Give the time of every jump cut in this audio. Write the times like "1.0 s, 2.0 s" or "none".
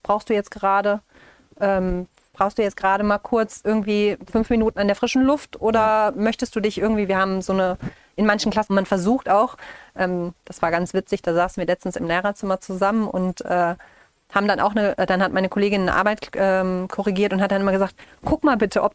8.7 s